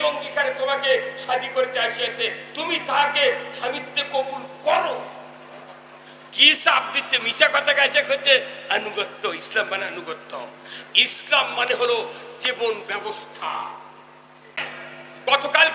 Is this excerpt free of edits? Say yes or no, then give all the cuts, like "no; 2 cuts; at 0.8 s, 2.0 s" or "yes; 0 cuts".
no; 1 cut; at 14.6 s